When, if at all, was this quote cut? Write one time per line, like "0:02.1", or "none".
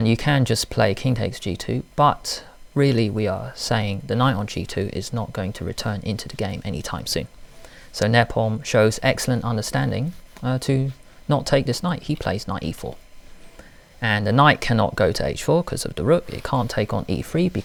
none